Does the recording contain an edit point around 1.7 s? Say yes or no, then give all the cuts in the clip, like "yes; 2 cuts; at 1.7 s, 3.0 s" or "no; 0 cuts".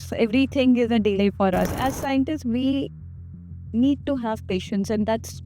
yes; 1 cut; at 1.7 s